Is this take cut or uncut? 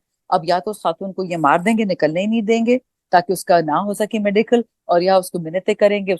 uncut